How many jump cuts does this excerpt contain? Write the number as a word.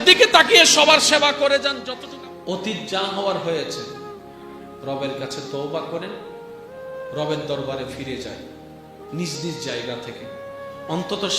one